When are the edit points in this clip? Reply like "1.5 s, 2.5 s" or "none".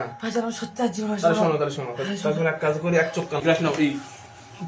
3.4 s